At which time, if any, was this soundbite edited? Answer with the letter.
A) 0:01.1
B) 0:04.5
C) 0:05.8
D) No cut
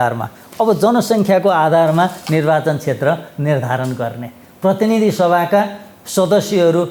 D